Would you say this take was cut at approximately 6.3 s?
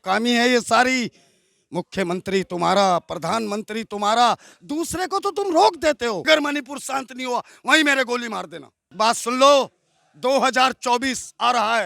yes; 2 cuts; at 6.3 s, 8.9 s

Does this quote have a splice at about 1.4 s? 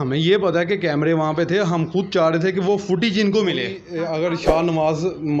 no; 1 cut; at 3.8 s

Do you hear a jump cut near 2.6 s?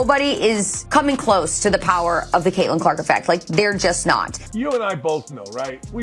no; 1 cut; at 4.4 s

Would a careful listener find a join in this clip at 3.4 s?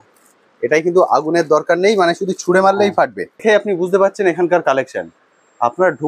yes; 1 cut; at 3.4 s

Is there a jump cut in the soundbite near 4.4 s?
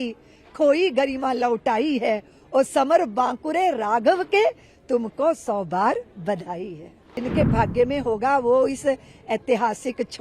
no; 1 cut; at 7.2 s

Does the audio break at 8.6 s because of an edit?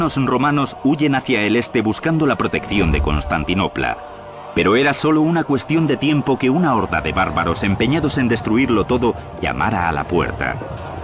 no; 1 cut; at 5.4 s

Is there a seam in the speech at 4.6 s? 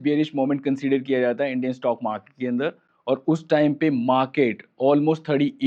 no; 0 cuts

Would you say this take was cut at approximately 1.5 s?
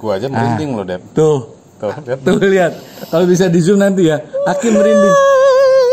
no; 0 cuts

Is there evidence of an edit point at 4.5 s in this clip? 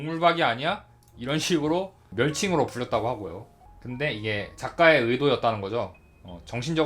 no; 1 cut; at 2.0 s

